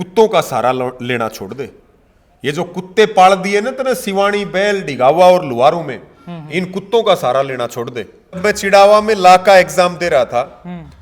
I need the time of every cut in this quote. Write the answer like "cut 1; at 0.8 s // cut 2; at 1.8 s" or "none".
cut 1; at 8.4 s